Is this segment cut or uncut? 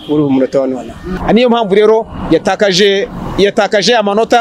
cut